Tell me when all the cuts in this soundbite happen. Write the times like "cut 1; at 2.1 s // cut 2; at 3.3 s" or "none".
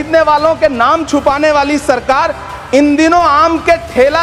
none